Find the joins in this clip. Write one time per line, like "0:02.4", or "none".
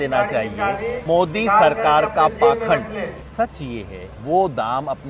0:01.0
0:03.2
0:04.1